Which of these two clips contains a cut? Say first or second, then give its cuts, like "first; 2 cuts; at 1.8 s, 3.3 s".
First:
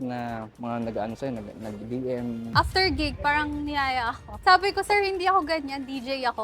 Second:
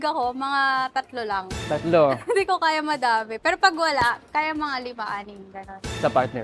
first; 2 cuts; at 2.4 s, 4.3 s